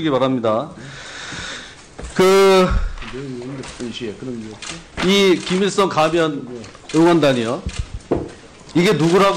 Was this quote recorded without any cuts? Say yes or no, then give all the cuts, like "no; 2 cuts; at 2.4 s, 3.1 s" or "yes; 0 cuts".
no; 1 cut; at 3.2 s